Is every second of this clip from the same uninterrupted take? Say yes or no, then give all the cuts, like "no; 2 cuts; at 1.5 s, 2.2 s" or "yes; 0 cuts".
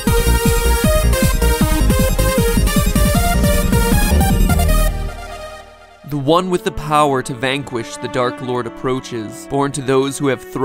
no; 1 cut; at 3.2 s